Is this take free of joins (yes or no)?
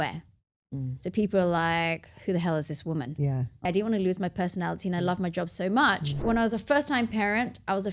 no